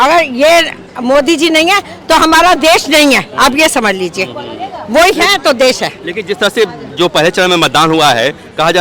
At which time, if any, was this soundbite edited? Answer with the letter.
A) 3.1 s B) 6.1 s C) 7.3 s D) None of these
D